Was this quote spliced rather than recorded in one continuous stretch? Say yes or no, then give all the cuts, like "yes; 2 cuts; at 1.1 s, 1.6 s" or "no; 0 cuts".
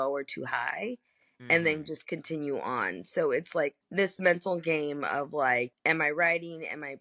yes; 2 cuts; at 3.8 s, 5.8 s